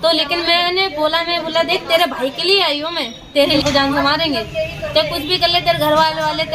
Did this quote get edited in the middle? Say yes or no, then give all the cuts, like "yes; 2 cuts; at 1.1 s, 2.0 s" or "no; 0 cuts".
yes; 1 cut; at 3.6 s